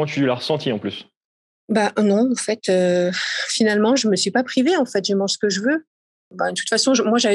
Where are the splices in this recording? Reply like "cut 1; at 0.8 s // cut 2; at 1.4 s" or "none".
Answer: cut 1; at 6.3 s

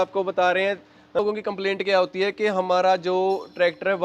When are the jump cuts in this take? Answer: cut 1; at 1.2 s

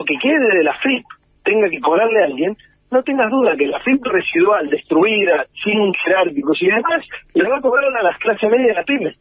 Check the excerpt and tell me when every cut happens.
none

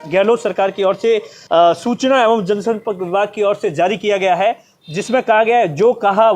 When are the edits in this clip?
cut 1; at 1.3 s

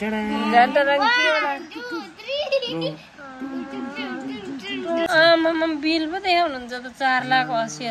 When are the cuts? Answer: cut 1; at 5.1 s

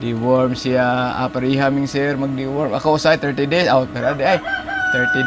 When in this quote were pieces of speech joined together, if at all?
none

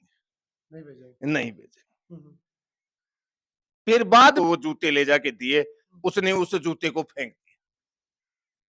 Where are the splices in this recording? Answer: cut 1; at 4.3 s

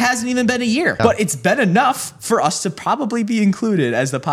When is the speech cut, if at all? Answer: cut 1; at 1.0 s

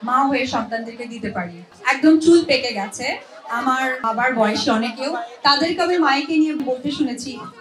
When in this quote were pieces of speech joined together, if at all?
cut 1; at 1.7 s // cut 2; at 4.0 s // cut 3; at 6.6 s

